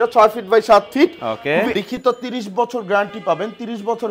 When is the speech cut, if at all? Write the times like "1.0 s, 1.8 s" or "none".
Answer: 1.7 s